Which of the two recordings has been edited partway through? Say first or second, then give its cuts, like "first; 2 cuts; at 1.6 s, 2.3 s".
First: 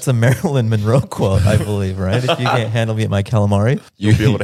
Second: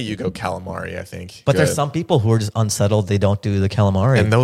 second; 1 cut; at 1.4 s